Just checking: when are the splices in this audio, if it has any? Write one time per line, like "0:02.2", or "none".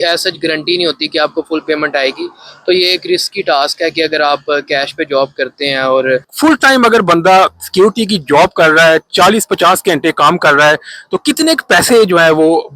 0:06.3